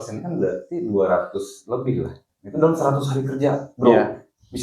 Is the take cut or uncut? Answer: cut